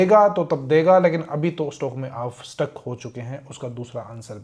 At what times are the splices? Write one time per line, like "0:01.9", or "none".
none